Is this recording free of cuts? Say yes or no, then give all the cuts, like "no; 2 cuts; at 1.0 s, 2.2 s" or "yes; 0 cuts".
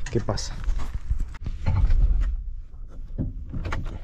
no; 1 cut; at 1.4 s